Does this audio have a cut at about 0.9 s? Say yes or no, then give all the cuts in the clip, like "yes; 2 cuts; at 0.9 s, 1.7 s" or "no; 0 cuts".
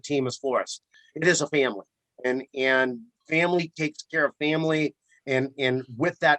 yes; 1 cut; at 0.9 s